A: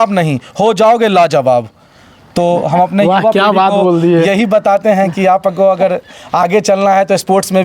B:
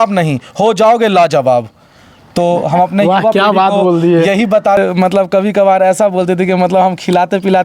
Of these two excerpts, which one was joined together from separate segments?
B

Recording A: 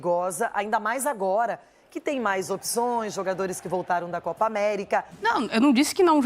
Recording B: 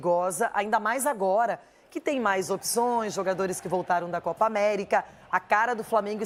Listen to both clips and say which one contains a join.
A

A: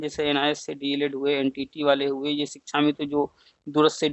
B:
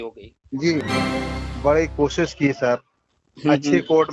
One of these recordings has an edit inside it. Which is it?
B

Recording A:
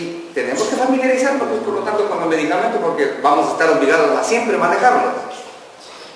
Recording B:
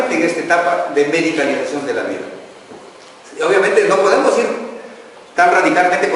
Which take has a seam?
B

